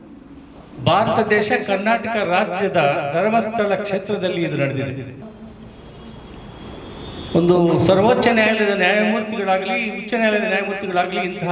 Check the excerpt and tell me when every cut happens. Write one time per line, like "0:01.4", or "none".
0:05.2